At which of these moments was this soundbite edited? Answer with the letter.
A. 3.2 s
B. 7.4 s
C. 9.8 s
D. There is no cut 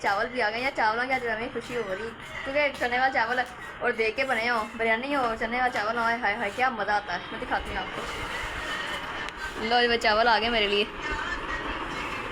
D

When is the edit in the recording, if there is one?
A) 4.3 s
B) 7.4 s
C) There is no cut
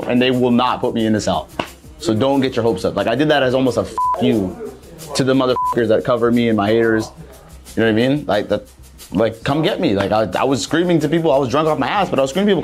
C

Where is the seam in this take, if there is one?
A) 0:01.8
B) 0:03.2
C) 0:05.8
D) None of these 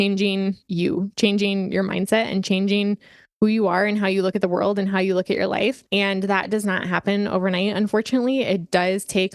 C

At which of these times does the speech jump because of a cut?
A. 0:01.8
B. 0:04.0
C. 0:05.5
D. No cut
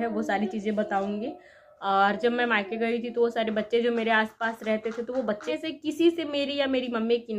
C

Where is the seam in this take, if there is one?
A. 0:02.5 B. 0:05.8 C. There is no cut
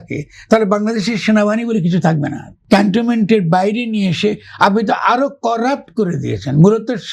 A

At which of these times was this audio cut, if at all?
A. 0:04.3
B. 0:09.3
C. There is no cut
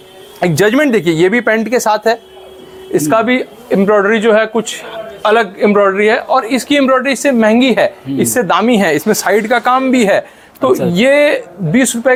C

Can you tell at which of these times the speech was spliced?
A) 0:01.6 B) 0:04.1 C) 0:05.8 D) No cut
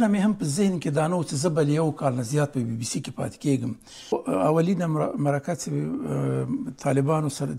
B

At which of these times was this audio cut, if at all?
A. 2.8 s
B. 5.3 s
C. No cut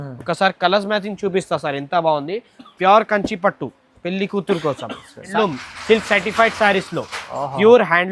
B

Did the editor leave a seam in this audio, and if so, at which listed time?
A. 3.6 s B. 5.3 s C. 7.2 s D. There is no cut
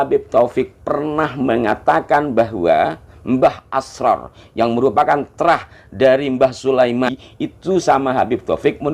C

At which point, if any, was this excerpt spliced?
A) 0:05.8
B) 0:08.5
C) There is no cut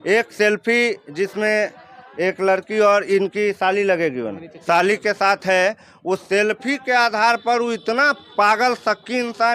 C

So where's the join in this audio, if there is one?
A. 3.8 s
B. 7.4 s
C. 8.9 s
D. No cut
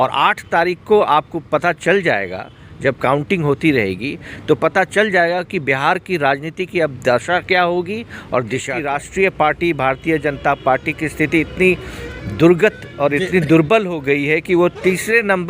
C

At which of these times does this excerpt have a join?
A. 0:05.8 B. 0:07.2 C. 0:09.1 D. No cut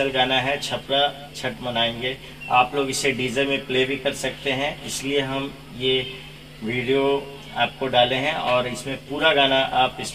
D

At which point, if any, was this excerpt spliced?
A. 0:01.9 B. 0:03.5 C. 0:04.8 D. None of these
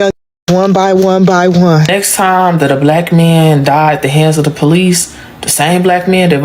A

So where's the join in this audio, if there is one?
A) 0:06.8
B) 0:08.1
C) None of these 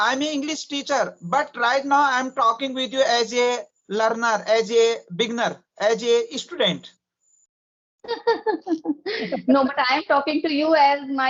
C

